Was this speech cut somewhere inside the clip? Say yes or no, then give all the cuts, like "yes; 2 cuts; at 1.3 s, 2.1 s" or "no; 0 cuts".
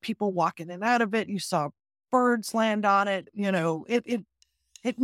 yes; 1 cut; at 3.3 s